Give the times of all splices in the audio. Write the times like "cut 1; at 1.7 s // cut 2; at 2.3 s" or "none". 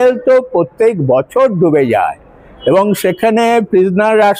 none